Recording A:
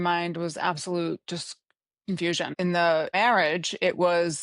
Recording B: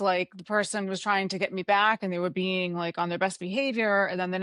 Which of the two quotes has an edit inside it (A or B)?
A